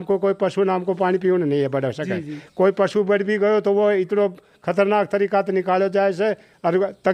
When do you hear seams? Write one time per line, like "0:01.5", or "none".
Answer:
none

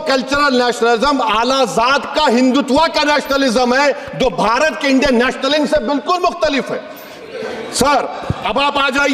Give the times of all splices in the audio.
none

